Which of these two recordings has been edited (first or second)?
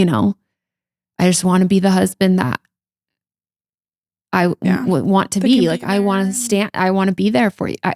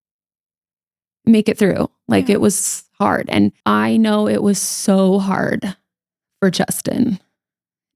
second